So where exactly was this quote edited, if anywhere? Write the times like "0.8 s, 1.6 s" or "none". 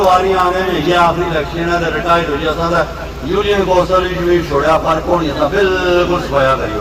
none